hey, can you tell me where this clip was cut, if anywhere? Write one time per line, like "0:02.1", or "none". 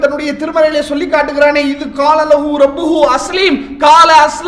none

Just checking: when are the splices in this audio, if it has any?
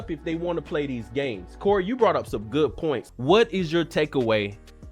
0:03.1

